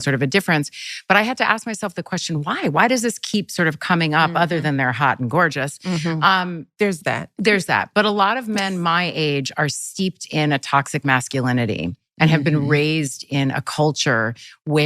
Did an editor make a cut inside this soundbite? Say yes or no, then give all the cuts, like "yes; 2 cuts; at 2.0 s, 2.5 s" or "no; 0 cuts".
no; 0 cuts